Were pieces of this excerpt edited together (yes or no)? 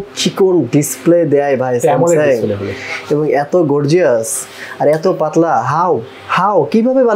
no